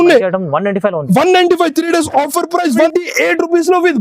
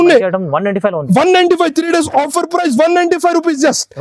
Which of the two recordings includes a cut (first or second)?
first